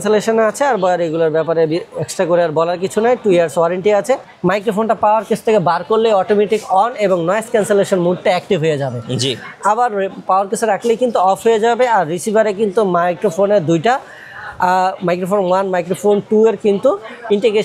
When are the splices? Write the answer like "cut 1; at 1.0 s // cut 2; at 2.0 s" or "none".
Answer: cut 1; at 4.3 s

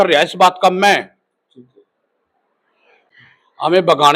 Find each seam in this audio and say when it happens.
cut 1; at 3.0 s

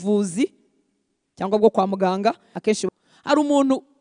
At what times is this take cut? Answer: cut 1; at 2.6 s

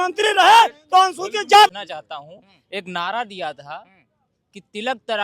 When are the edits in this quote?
cut 1; at 1.8 s

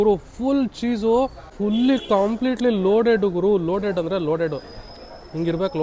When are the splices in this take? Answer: cut 1; at 1.4 s

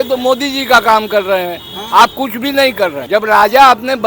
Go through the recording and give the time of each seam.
cut 1; at 3.0 s

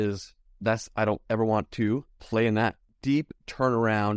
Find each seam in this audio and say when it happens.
cut 1; at 2.9 s

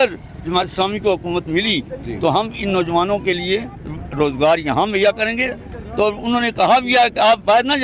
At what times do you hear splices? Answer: none

